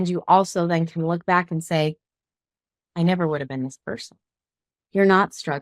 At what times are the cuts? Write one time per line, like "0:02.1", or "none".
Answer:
0:04.7